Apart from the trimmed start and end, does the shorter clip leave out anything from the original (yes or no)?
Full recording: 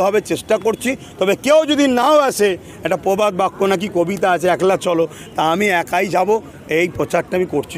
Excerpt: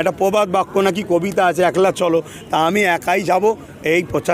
no